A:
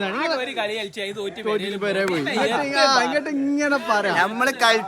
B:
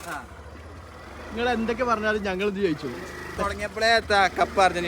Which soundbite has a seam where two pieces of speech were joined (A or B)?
B